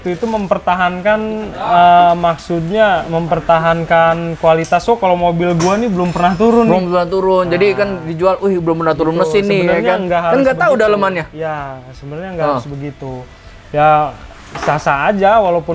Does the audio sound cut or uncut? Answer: uncut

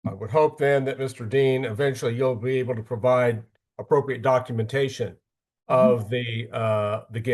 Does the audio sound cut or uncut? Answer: uncut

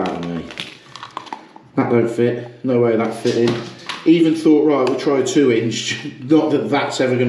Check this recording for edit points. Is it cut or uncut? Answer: uncut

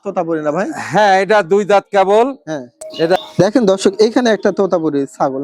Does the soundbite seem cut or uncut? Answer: cut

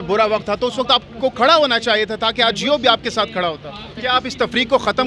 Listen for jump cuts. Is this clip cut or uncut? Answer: cut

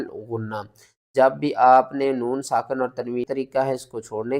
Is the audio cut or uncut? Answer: cut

